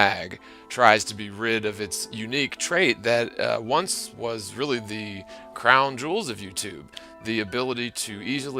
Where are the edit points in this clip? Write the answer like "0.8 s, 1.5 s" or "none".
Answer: 6.2 s